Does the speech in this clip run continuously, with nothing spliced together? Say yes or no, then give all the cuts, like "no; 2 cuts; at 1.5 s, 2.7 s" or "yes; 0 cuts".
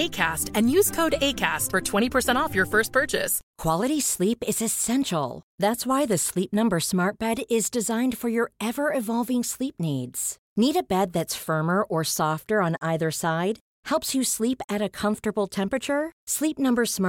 no; 1 cut; at 3.4 s